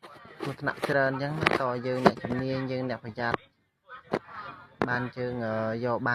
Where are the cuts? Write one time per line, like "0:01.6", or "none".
none